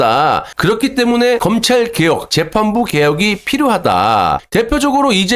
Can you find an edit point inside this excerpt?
yes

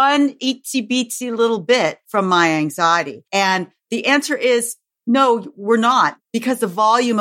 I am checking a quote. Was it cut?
yes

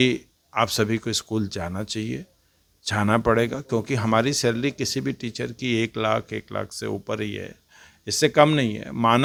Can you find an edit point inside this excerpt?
no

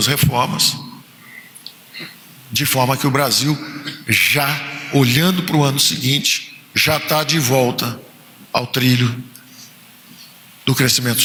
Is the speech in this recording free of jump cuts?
yes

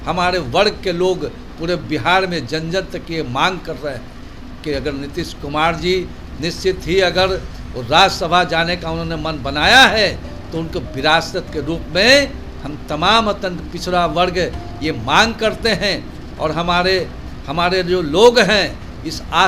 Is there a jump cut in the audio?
no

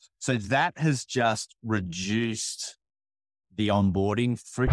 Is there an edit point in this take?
no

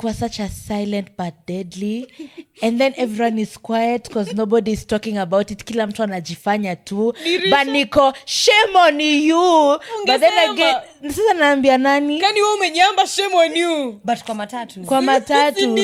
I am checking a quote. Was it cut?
no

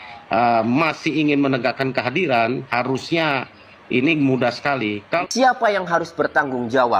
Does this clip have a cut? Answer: yes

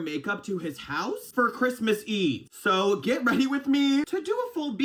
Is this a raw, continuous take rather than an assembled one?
yes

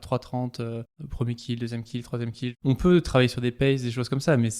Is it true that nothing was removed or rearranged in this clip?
no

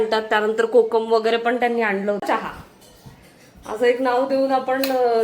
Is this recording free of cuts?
no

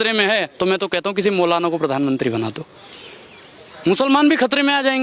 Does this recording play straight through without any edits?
yes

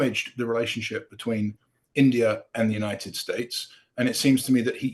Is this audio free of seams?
yes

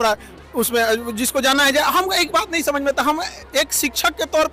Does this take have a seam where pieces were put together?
no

